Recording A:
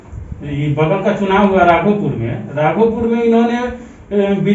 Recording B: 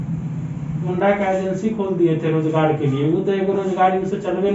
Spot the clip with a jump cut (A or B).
B